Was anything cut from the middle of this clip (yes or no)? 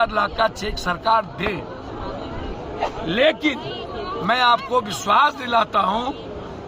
no